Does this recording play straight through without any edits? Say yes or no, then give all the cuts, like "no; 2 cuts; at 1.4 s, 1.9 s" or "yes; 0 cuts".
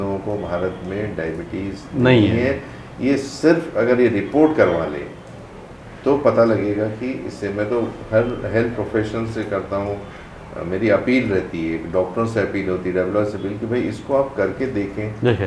yes; 0 cuts